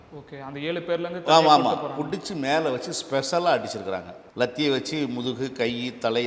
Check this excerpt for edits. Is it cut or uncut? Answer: cut